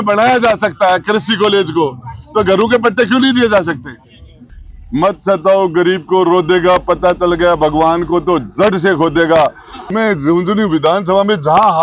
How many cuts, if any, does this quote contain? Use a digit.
2